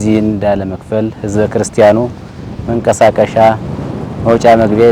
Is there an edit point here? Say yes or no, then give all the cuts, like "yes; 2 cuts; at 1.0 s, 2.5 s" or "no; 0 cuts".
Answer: no; 0 cuts